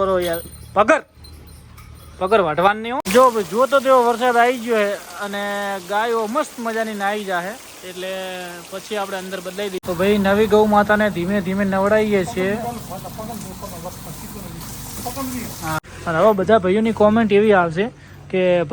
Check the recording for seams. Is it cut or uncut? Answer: cut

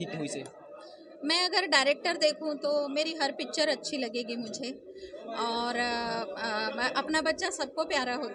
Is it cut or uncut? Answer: uncut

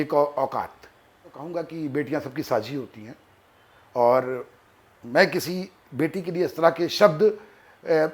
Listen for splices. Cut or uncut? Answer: cut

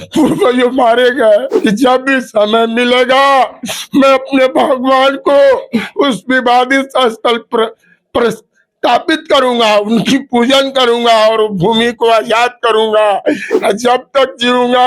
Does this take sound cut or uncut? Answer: cut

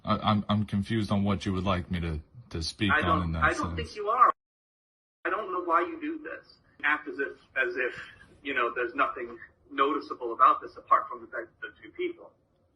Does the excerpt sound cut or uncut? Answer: cut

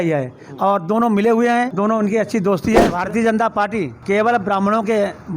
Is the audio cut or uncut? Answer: cut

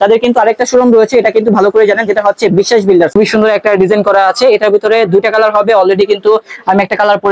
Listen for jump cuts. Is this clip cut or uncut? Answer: cut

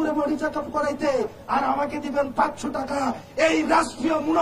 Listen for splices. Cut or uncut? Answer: uncut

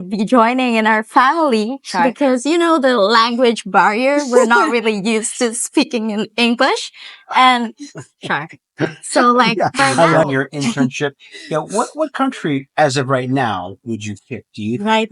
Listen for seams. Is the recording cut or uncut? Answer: cut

